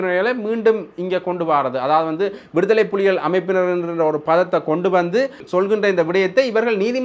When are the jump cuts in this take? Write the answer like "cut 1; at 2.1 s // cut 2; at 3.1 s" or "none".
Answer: cut 1; at 5.4 s

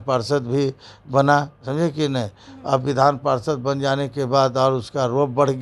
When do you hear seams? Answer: none

